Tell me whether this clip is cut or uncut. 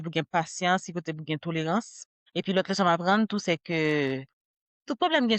cut